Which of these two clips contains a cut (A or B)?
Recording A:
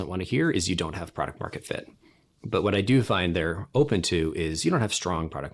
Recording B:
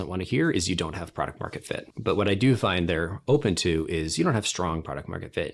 B